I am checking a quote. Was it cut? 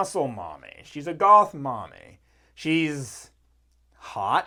no; 0 cuts

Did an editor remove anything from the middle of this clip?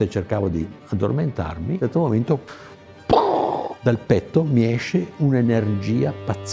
no; 0 cuts

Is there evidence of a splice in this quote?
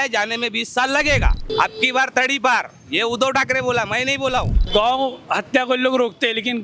yes; 2 cuts; at 1.5 s, 4.6 s

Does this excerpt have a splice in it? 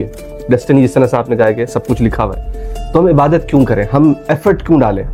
no; 0 cuts

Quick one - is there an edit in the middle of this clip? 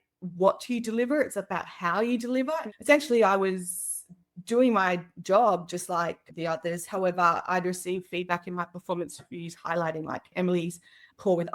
yes; 2 cuts; at 2.7 s, 10.3 s

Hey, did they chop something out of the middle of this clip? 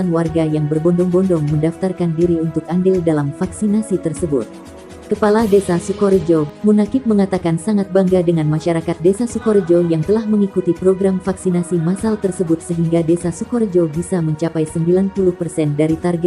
yes; 1 cut; at 6.5 s

